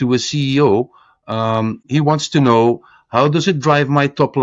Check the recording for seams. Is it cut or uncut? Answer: cut